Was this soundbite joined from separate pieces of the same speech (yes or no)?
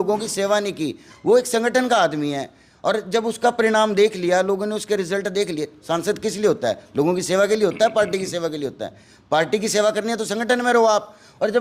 no